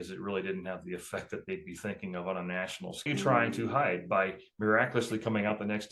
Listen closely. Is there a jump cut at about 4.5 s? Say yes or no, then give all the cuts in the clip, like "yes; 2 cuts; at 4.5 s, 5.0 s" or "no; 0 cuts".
no; 1 cut; at 3.1 s